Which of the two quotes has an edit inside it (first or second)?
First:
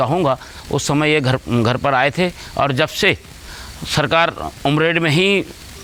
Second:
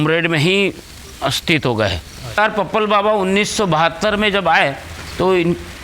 second